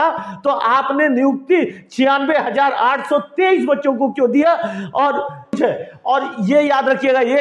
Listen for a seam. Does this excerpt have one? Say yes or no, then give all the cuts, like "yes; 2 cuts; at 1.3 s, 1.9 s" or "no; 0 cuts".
yes; 1 cut; at 5.6 s